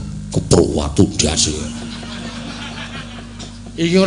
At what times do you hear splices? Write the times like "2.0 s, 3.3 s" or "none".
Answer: none